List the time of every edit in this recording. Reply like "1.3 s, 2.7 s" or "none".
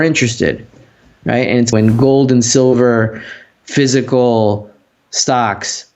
1.7 s